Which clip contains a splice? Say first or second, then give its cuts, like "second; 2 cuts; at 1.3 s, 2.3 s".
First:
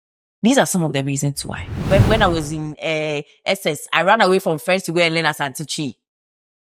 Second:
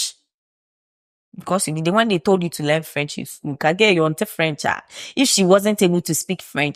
first; 1 cut; at 1.7 s